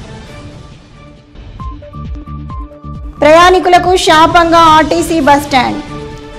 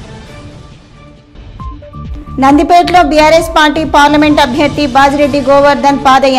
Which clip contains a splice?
second; 1 cut; at 1.9 s

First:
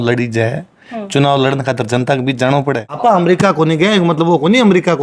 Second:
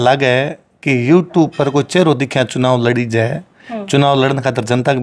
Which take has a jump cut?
first; 1 cut; at 3.2 s

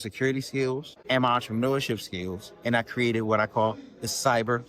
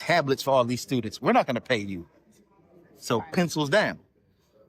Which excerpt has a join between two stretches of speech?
first; 1 cut; at 0.9 s

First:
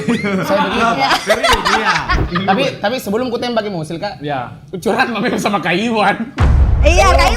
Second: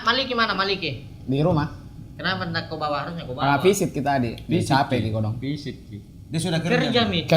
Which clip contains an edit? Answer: first; 1 cut; at 2.3 s

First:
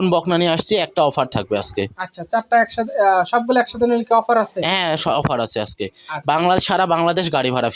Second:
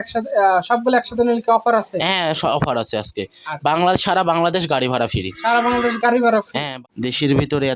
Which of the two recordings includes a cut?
second; 1 cut; at 6.6 s

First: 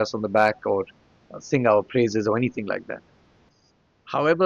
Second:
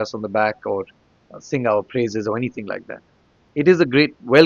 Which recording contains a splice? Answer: second; 1 cut; at 3.4 s

